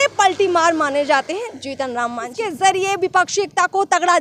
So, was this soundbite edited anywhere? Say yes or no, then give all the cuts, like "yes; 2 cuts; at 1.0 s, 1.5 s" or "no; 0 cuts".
yes; 1 cut; at 2.5 s